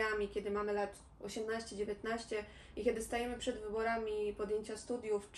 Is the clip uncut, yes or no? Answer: yes